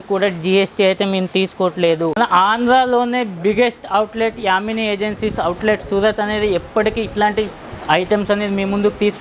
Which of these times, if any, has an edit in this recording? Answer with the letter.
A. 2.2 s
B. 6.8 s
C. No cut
A